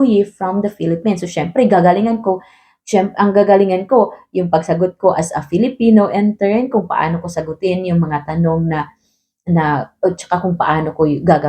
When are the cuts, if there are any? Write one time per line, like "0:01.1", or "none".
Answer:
none